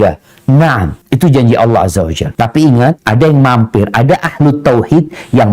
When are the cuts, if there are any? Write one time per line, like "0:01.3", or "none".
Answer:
0:01.0
0:02.2
0:03.0